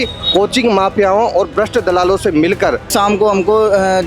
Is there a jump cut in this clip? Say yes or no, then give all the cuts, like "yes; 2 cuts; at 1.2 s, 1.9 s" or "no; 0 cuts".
yes; 1 cut; at 2.9 s